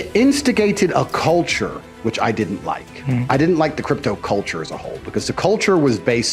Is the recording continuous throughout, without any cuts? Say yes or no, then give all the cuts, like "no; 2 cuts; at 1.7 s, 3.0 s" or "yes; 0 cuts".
yes; 0 cuts